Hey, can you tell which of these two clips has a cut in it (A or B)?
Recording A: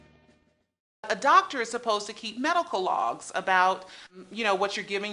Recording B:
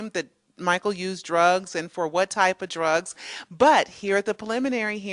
A